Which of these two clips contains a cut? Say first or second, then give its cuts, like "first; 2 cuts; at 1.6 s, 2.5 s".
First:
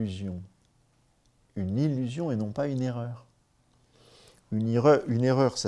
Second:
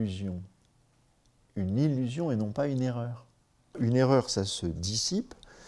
second; 1 cut; at 3.8 s